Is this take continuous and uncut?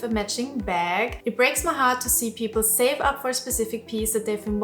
no; 1 cut; at 1.2 s

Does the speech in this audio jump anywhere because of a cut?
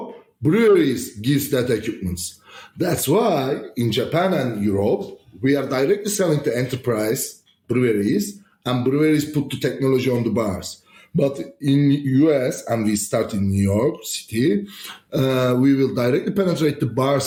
no; 0 cuts

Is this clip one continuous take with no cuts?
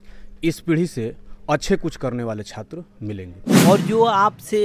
no; 1 cut; at 3.4 s

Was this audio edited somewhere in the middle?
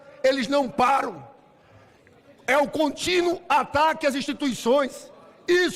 no; 0 cuts

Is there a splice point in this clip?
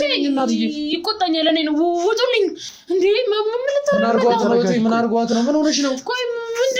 no; 0 cuts

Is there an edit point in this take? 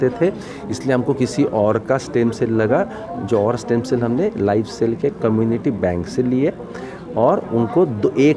no; 0 cuts

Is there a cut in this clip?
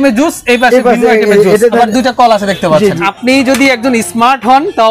yes; 2 cuts; at 1.7 s, 3.0 s

